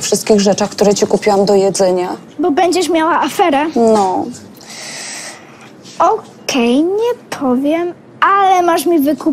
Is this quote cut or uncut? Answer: uncut